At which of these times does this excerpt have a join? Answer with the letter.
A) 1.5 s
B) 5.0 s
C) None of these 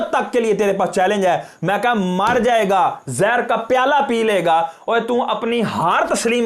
C